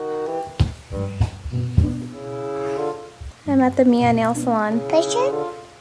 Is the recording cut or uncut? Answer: cut